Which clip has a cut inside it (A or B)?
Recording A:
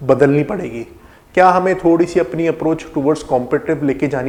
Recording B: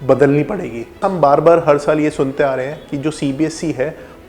B